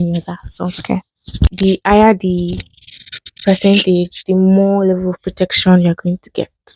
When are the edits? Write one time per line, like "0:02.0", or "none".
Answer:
0:01.5